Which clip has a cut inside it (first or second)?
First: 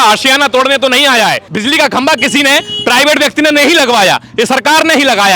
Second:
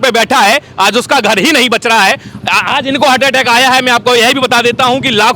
first